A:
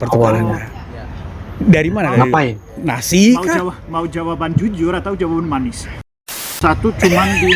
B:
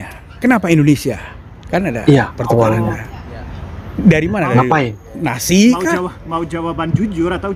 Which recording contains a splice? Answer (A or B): A